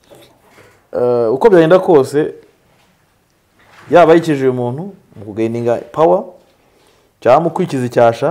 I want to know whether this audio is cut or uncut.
uncut